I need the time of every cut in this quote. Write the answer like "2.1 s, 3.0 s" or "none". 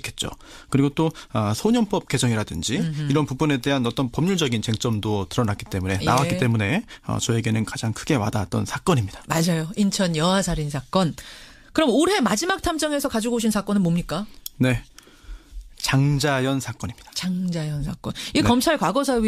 1.2 s